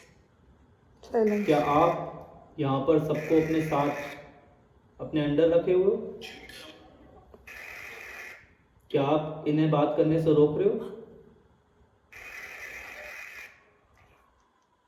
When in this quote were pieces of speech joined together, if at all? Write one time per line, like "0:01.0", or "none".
none

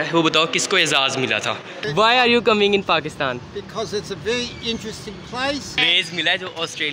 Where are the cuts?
0:01.9
0:05.8

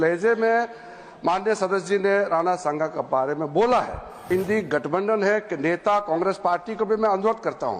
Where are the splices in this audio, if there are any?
0:04.3

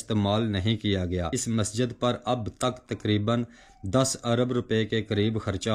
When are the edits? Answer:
0:01.4

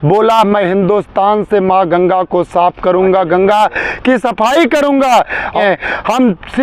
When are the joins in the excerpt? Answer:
0:05.6

